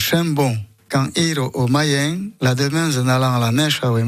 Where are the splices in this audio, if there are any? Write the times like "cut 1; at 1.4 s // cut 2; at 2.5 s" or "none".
none